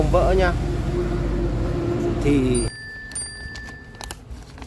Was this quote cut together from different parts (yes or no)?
yes